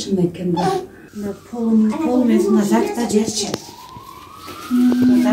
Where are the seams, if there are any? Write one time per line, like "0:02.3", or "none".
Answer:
0:01.0